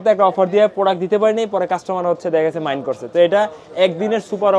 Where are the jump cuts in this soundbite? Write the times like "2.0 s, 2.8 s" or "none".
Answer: none

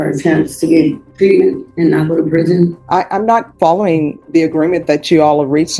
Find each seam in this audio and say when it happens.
1.1 s, 1.7 s, 2.8 s, 4.2 s

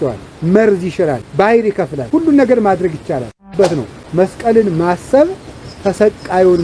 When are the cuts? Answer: 1.2 s, 2.0 s, 3.7 s

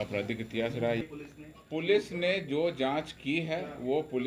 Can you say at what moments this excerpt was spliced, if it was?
1.0 s

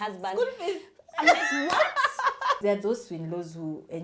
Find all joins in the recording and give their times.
2.6 s

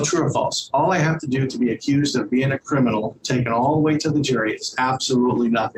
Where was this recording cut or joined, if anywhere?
none

